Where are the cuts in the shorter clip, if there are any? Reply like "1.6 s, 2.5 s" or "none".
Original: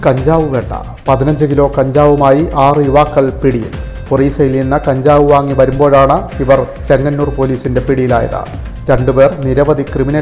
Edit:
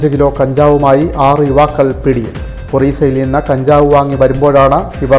none